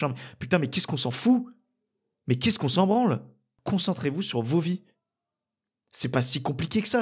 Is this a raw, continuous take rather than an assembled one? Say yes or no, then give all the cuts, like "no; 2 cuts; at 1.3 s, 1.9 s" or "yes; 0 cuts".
no; 1 cut; at 3.5 s